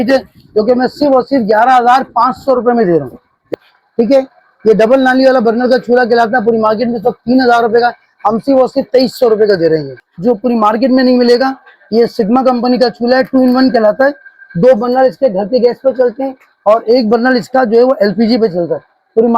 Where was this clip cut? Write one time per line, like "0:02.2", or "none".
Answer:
0:03.5
0:09.9